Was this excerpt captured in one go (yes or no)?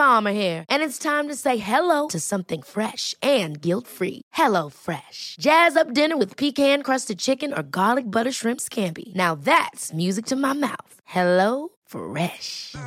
yes